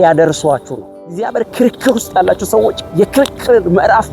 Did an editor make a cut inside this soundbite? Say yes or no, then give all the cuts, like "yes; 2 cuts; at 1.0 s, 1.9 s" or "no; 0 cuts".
yes; 1 cut; at 1.1 s